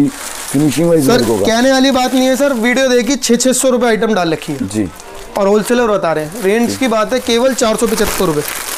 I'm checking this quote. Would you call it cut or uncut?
uncut